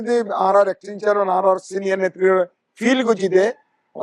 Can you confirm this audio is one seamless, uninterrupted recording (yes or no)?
yes